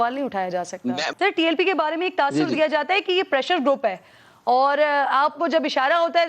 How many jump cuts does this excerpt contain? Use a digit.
1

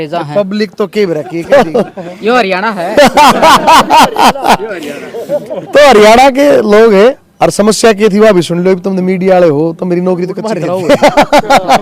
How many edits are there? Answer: 3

